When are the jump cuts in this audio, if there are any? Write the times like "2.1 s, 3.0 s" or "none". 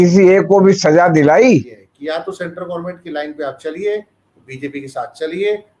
1.8 s

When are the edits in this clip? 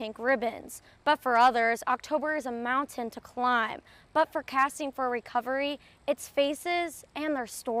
none

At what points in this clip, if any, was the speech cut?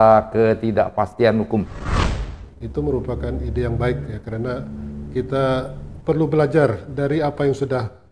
1.9 s

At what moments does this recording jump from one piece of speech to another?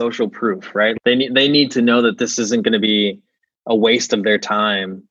1.0 s

